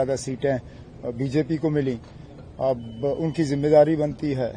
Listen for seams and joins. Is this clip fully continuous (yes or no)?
yes